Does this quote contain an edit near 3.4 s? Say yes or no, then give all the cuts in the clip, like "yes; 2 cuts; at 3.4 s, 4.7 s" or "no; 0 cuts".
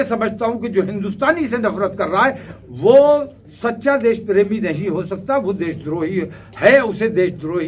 no; 0 cuts